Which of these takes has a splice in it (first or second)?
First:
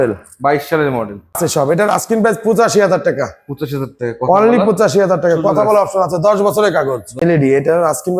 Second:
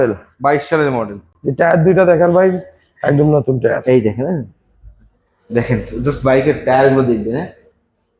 first